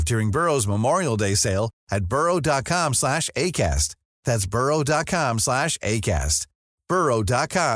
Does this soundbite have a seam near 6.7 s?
no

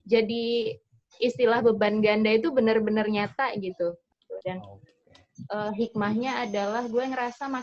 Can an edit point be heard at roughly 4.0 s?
yes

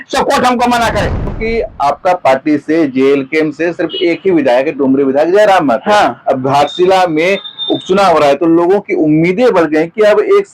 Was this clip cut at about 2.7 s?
no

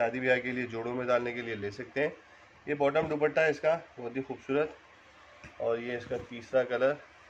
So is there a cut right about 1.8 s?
no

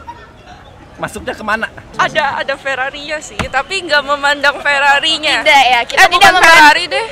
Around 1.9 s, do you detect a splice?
yes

